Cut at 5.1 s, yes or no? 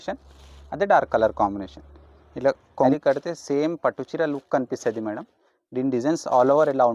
no